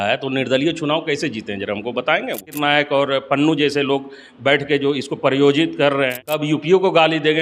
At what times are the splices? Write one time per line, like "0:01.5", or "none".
0:02.5
0:06.2